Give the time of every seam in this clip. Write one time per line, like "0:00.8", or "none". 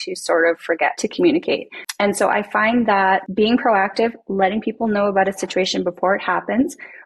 0:01.0
0:01.8
0:03.3